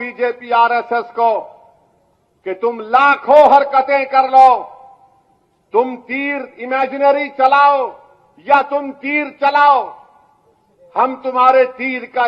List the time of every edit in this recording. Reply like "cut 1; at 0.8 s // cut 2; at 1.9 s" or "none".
none